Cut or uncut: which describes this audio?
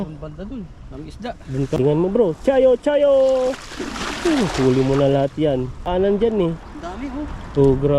cut